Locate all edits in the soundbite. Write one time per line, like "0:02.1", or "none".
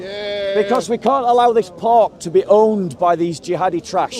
none